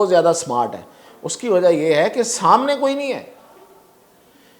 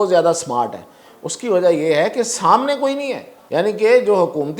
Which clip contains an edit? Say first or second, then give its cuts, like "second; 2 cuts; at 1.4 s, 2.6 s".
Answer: second; 1 cut; at 3.3 s